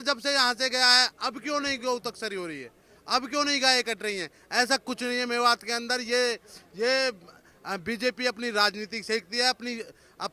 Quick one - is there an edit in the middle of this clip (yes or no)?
no